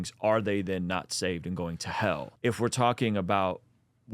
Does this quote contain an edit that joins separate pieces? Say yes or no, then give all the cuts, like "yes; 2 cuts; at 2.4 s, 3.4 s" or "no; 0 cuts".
yes; 1 cut; at 2.3 s